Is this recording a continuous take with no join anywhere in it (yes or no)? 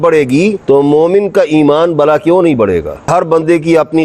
no